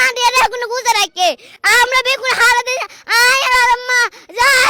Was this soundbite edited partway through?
no; 0 cuts

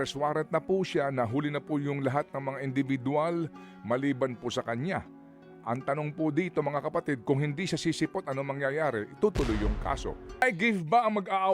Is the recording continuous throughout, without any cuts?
no; 1 cut; at 10.4 s

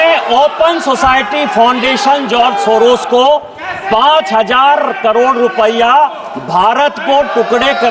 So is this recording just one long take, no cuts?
yes; 0 cuts

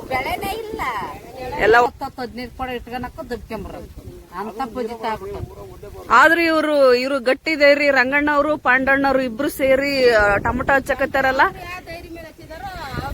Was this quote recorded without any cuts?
no; 1 cut; at 1.9 s

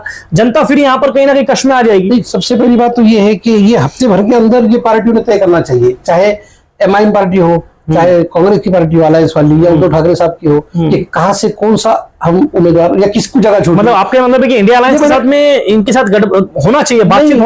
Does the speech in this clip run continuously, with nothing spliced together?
yes; 0 cuts

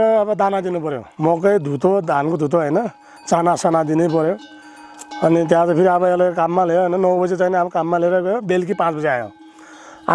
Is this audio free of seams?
no; 1 cut; at 1.1 s

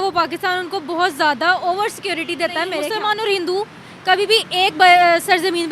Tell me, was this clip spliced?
yes; 1 cut; at 2.8 s

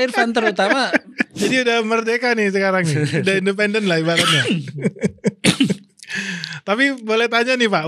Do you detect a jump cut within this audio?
yes; 1 cut; at 1.4 s

